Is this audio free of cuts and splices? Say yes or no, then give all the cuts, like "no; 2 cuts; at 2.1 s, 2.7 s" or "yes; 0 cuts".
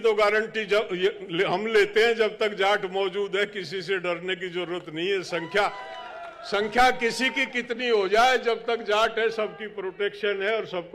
yes; 0 cuts